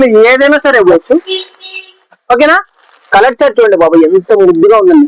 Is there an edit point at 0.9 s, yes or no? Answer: yes